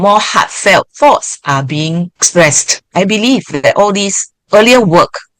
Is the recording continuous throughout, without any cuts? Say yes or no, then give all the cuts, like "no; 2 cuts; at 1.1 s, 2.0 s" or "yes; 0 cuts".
no; 1 cut; at 0.9 s